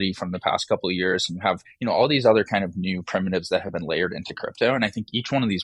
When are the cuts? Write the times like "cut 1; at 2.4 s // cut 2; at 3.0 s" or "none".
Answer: cut 1; at 1.7 s